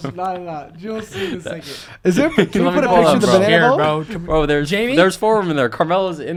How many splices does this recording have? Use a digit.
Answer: 0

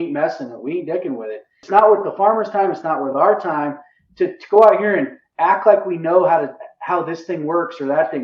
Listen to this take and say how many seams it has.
1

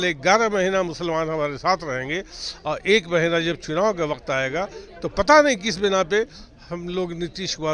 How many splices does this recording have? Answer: 0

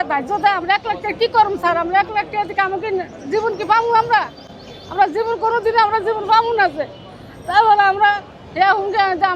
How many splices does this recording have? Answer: 0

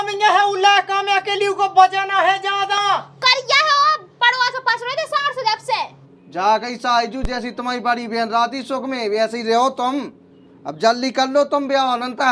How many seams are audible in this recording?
1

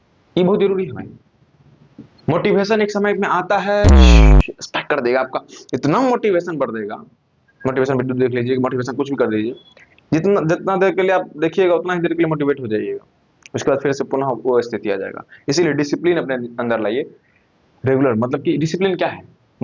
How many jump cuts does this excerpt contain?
0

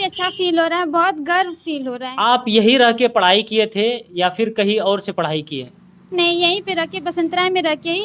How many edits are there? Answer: 1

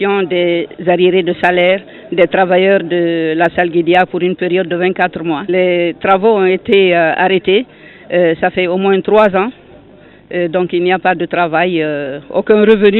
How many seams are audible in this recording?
1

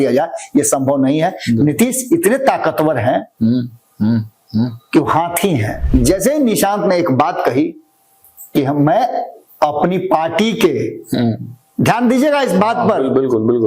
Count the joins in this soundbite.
1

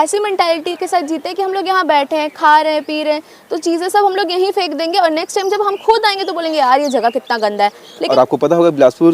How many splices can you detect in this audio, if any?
1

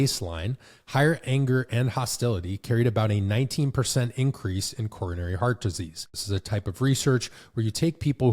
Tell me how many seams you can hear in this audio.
1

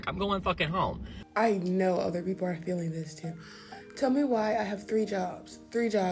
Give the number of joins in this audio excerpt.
1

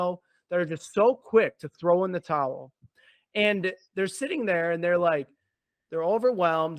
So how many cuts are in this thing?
0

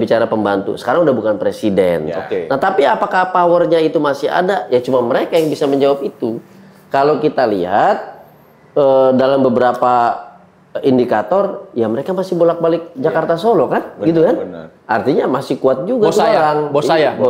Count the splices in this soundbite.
0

